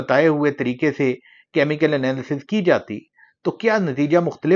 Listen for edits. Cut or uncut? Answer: uncut